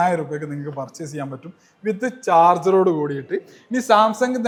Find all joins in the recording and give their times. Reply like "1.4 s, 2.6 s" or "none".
none